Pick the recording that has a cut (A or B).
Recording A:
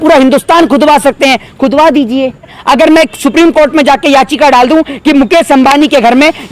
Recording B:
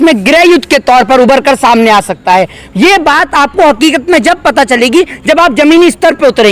A